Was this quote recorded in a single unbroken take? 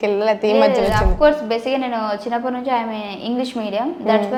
yes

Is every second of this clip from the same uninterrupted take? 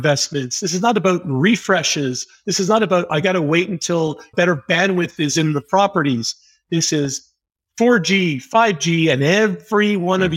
no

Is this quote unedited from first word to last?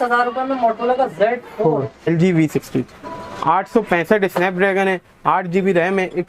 no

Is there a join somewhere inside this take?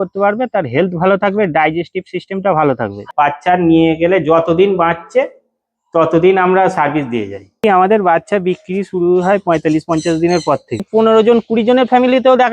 yes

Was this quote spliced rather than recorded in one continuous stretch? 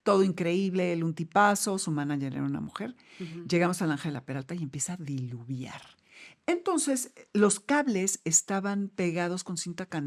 no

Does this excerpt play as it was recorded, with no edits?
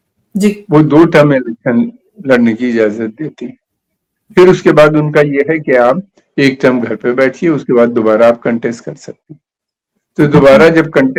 yes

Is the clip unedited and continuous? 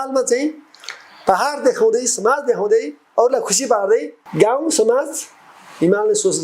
no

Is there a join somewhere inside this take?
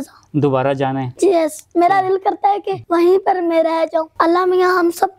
yes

